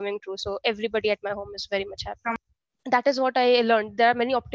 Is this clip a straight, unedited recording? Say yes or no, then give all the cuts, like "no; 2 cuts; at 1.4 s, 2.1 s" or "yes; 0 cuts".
no; 1 cut; at 2.3 s